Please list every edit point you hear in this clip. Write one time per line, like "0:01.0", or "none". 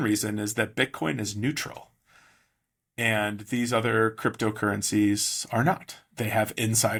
none